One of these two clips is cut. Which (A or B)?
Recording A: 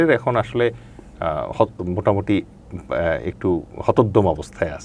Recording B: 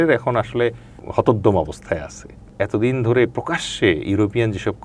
B